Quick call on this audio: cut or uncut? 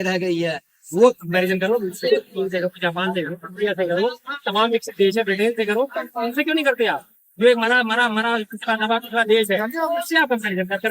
cut